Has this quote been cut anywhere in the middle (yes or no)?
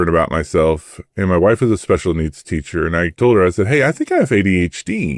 yes